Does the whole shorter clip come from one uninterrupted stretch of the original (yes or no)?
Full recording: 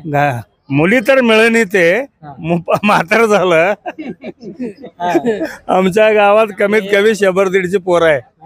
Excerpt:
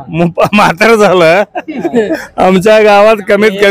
no